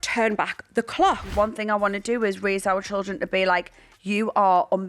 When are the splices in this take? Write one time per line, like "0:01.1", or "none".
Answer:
0:01.3